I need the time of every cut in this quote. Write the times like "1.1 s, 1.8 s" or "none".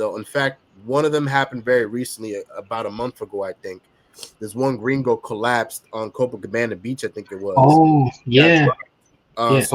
none